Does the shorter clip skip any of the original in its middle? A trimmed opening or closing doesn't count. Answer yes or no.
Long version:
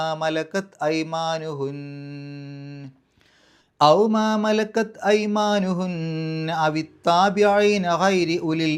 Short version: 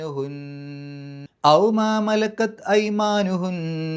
yes